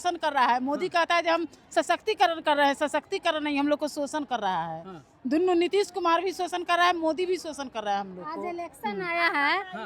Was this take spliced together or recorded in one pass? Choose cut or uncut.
uncut